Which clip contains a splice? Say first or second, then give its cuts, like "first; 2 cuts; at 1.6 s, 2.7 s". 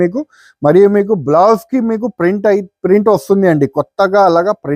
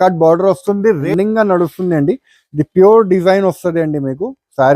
second; 1 cut; at 1.1 s